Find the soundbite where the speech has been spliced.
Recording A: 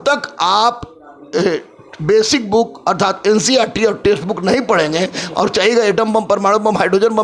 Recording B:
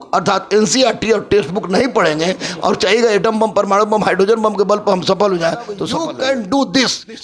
B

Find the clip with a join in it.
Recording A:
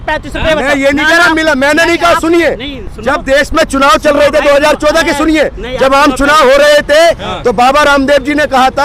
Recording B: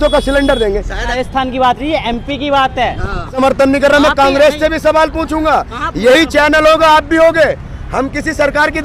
B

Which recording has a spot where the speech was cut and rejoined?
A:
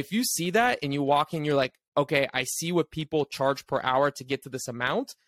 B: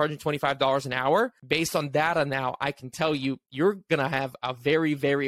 B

